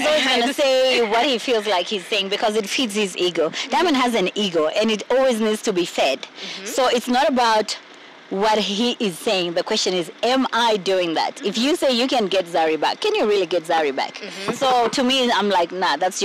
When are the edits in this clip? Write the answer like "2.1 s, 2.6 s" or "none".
none